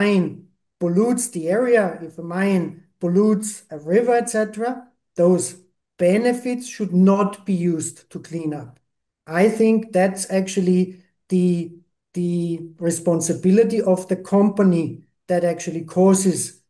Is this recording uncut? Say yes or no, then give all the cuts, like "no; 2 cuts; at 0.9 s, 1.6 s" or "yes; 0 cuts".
yes; 0 cuts